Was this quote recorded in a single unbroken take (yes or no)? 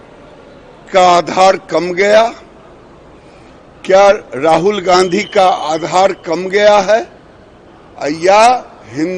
yes